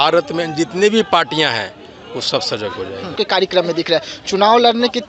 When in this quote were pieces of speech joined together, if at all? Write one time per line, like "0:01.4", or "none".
0:03.2